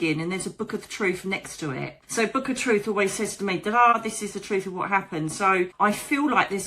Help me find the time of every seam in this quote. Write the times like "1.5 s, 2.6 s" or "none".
2.0 s, 3.9 s, 5.7 s